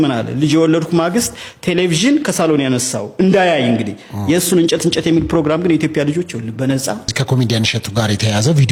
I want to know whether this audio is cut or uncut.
uncut